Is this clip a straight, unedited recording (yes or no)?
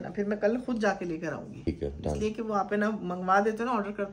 no